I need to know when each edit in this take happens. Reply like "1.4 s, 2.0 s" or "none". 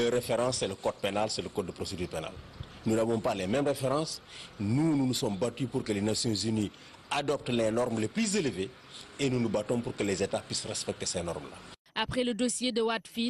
none